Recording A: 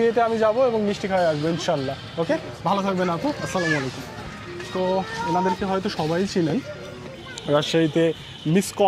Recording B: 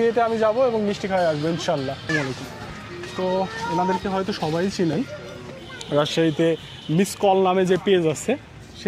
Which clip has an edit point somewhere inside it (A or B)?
B